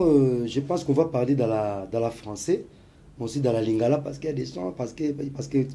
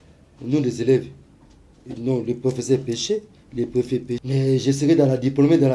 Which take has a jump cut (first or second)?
second